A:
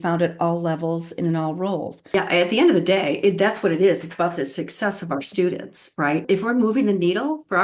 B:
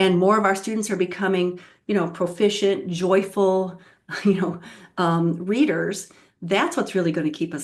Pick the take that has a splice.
A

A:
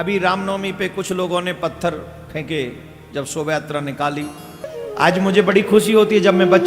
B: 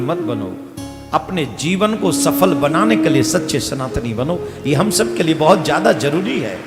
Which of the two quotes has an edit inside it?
A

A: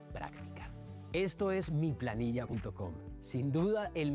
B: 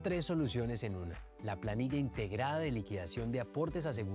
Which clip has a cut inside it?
A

